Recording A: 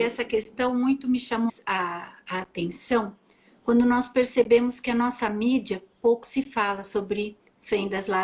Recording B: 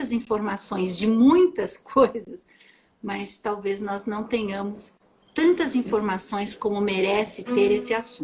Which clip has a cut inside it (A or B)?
A